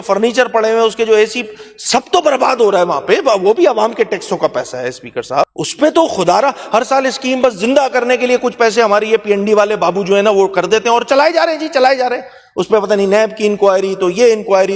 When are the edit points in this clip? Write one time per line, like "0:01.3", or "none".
0:05.5

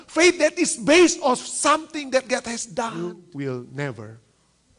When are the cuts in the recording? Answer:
0:03.2

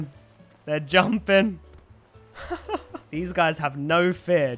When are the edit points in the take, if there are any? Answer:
0:03.0

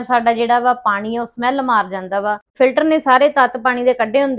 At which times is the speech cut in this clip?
0:02.5

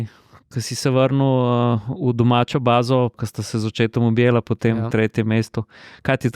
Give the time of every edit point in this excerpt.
0:03.2

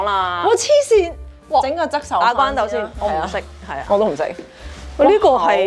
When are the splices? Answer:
none

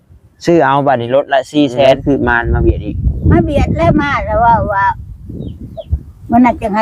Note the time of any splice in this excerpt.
0:02.0

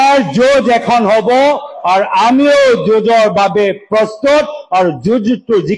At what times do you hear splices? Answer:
none

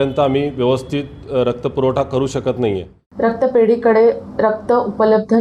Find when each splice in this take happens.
0:03.0

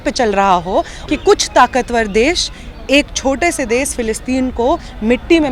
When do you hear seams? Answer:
0:01.0

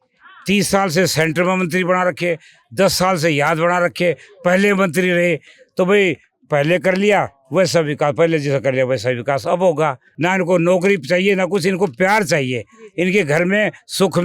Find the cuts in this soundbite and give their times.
0:10.1

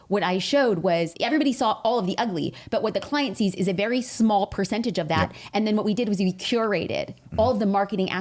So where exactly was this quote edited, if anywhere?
none

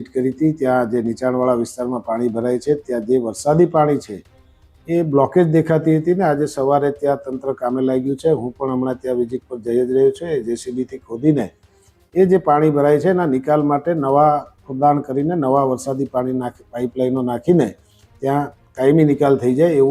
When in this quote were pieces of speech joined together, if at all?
none

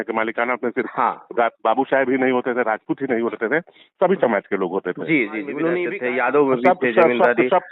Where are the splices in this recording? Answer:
0:05.9

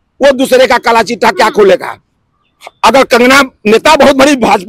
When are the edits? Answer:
none

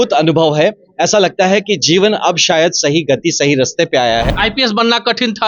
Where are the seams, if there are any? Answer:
0:04.3

